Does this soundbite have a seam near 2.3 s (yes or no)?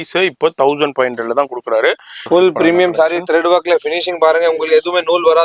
yes